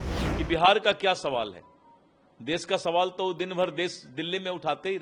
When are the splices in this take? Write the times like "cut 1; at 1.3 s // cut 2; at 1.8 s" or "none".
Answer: none